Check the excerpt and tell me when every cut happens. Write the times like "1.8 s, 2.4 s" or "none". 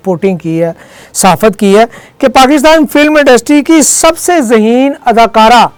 none